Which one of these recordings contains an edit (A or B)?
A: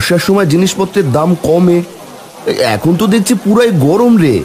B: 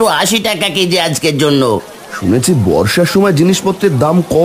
B